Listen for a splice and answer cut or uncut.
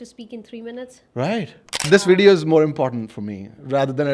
cut